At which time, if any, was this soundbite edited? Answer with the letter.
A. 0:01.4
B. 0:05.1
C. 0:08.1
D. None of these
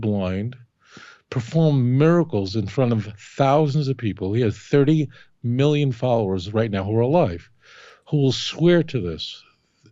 D